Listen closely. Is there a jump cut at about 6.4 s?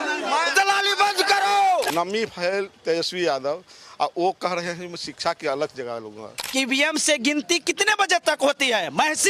yes; 2 cuts; at 1.9 s, 6.4 s

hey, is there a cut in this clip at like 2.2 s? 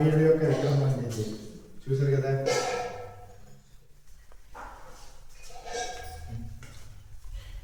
no; 0 cuts

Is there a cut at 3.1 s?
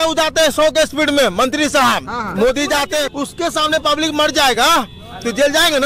yes; 1 cut; at 3.1 s

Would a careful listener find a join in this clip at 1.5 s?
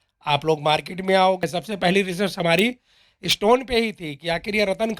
yes; 1 cut; at 1.5 s

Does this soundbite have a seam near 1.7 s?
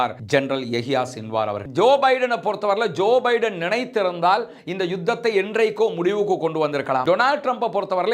yes; 2 cuts; at 1.7 s, 7.0 s

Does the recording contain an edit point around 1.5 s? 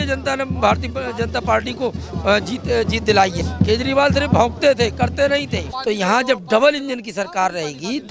no; 2 cuts; at 3.4 s, 5.7 s

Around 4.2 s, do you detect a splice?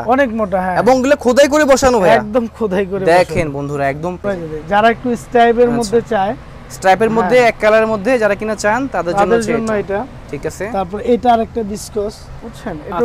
yes; 1 cut; at 4.2 s

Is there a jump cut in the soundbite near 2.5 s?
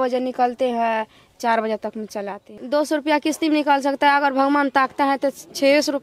yes; 1 cut; at 2.5 s

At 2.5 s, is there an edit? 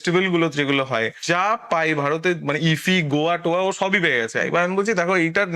no; 1 cut; at 1.2 s

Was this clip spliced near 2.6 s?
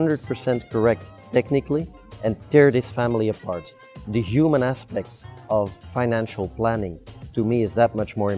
no; 1 cut; at 5.8 s

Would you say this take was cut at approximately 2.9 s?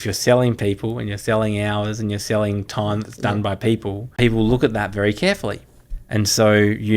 no; 1 cut; at 4.1 s

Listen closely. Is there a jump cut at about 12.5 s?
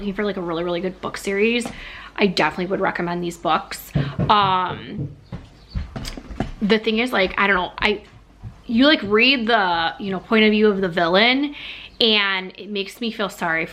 no; 0 cuts

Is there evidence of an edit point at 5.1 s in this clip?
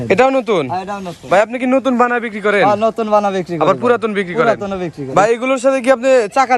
yes; 1 cut; at 5.1 s

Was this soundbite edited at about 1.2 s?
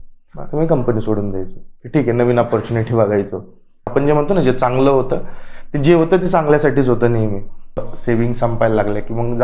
no; 2 cuts; at 3.9 s, 7.9 s

